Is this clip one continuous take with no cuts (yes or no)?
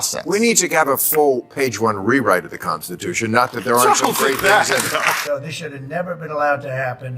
no